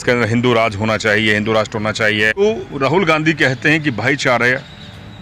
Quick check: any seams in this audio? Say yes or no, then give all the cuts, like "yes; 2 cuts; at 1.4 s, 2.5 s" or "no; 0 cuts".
yes; 1 cut; at 2.4 s